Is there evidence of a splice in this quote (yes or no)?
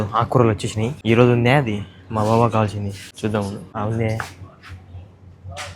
yes